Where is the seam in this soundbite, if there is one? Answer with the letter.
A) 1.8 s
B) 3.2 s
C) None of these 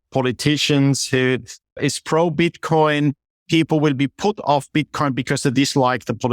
A